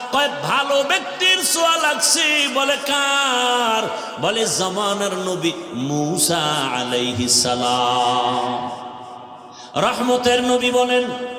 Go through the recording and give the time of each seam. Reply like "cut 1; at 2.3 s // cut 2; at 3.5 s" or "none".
none